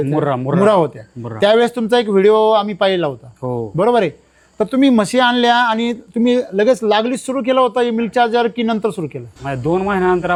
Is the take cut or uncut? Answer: uncut